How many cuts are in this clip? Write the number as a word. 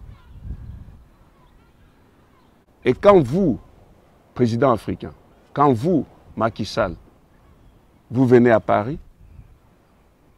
one